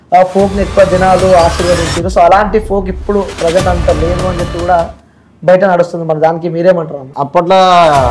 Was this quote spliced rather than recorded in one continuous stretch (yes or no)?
yes